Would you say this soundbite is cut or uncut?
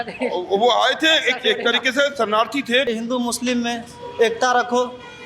cut